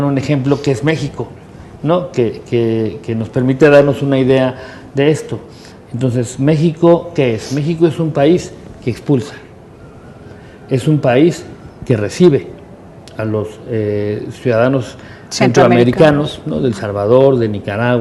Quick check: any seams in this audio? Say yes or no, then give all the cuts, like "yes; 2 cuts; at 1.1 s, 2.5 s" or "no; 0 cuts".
no; 0 cuts